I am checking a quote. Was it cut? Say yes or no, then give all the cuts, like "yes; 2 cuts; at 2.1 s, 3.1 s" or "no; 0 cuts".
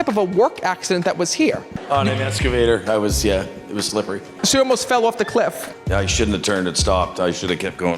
yes; 3 cuts; at 1.7 s, 4.3 s, 5.7 s